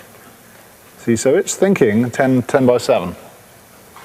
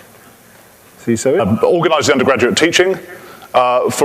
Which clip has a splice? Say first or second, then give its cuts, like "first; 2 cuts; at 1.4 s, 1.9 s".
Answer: first; 1 cut; at 1.4 s